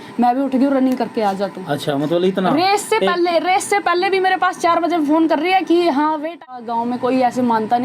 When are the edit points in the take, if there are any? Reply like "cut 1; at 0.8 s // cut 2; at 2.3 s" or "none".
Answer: cut 1; at 6.6 s